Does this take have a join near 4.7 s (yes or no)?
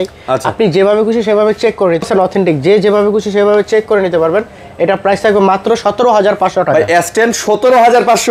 no